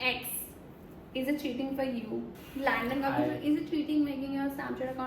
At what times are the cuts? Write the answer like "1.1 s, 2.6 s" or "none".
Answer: 2.4 s